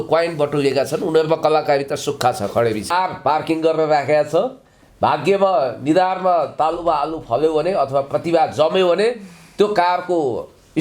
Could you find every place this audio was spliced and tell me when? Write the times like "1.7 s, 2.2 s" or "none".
2.9 s